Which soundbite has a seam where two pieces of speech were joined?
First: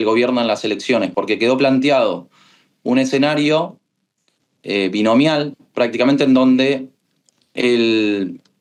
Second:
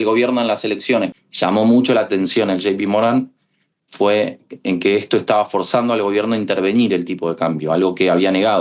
second; 1 cut; at 1.1 s

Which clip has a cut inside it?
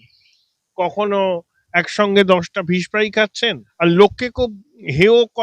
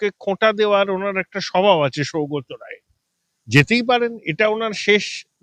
first; 1 cut; at 3.6 s

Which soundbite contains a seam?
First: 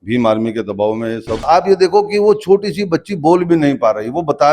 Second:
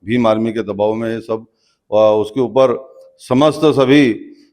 first; 1 cut; at 1.3 s

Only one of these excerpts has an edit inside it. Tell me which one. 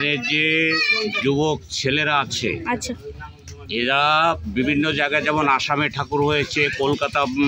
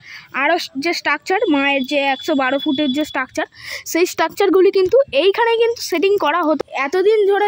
second; 1 cut; at 6.6 s

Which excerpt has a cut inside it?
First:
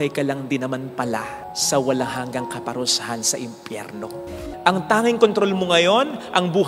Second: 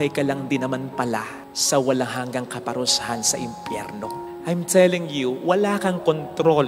first; 1 cut; at 4.4 s

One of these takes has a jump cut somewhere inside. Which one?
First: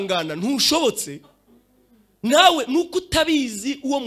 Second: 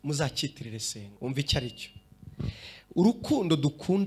second; 1 cut; at 1.0 s

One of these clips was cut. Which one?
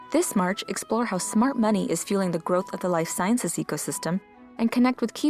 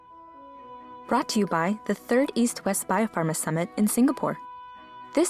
second; 1 cut; at 1.1 s

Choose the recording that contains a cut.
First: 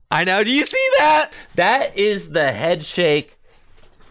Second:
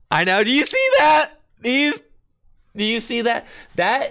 first; 1 cut; at 1.4 s

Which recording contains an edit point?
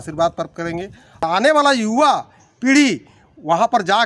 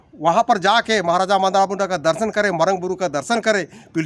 first; 1 cut; at 1.4 s

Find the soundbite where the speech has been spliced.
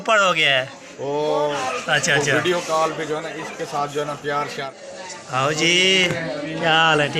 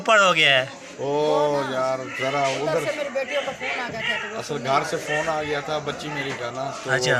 first; 2 cuts; at 1.6 s, 4.8 s

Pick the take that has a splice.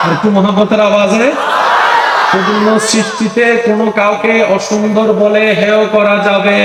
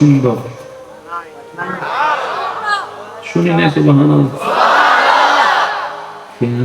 second; 1 cut; at 2.6 s

